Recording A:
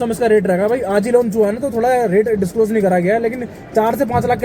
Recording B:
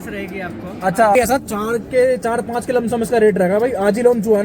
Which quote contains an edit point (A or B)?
B